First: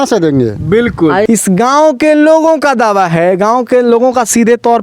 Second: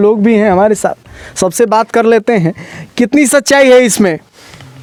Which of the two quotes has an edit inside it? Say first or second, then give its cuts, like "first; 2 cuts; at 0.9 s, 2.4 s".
first; 1 cut; at 1.2 s